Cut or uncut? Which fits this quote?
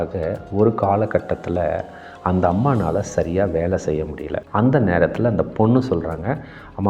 cut